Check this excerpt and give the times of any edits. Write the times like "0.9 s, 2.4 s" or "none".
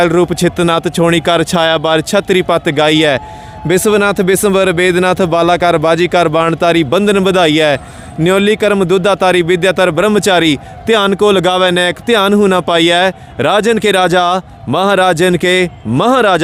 none

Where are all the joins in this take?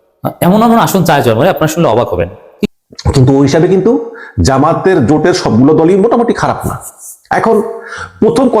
2.5 s

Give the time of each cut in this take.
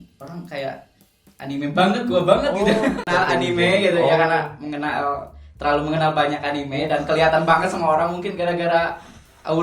3.1 s

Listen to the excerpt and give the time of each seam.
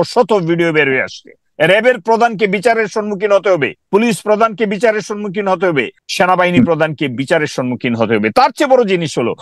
3.8 s, 6.0 s

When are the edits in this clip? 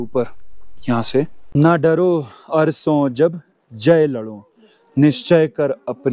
1.4 s

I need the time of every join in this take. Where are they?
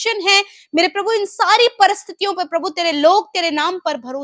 none

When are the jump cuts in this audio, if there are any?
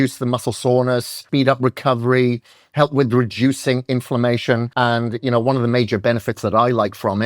1.2 s, 4.7 s

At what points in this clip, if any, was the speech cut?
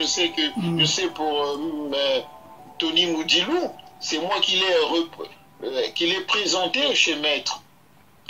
2.4 s

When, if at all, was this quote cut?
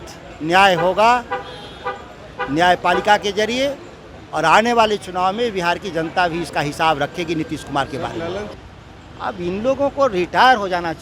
8.6 s

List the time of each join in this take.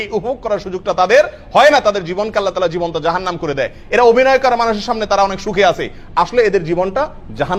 none

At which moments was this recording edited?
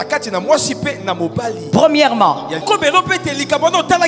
2.6 s

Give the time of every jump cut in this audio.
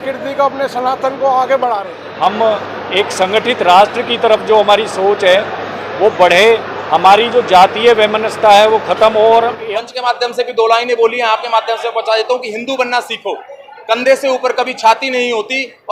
2.0 s, 9.7 s

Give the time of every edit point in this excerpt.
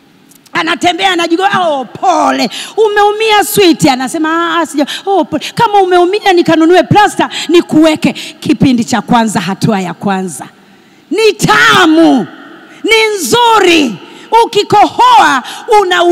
none

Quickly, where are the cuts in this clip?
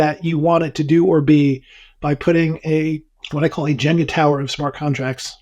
3.2 s

